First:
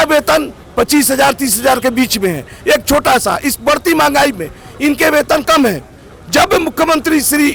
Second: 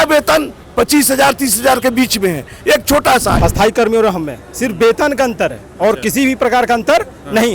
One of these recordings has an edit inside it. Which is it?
second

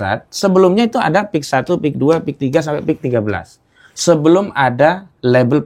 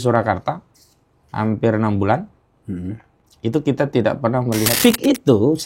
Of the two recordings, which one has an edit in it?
second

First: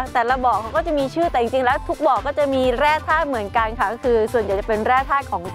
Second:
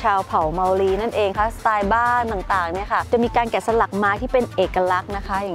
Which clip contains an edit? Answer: second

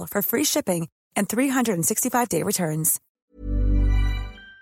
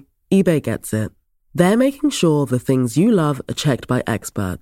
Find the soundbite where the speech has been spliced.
first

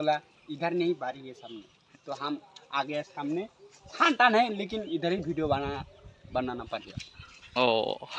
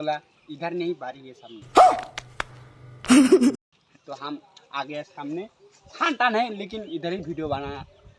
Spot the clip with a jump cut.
first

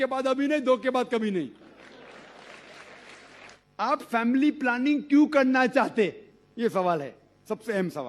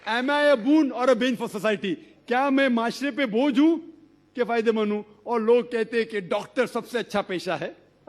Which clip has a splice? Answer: first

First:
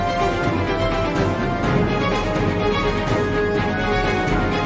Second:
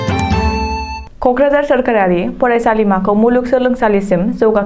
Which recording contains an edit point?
second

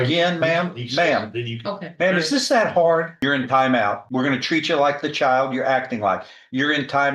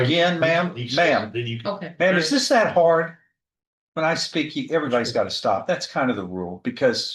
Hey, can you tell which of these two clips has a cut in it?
first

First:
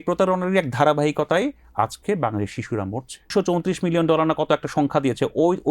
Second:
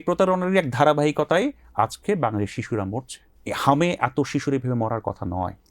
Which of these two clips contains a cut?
first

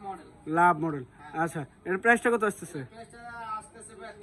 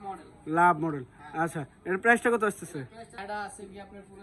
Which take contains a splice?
second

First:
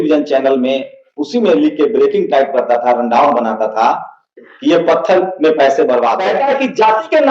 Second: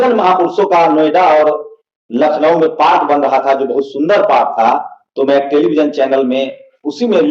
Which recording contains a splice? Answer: first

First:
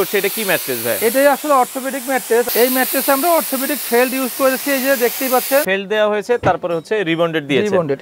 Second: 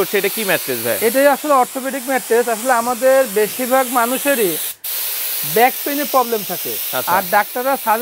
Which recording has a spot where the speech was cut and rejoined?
first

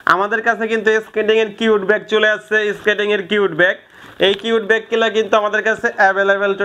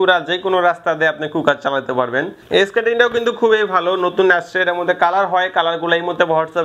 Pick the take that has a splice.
second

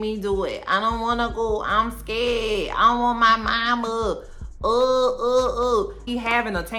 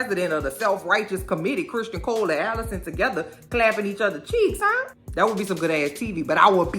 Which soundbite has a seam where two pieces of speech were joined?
second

